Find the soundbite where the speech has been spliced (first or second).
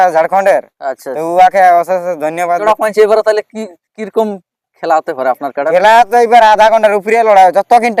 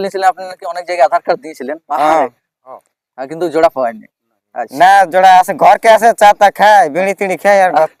first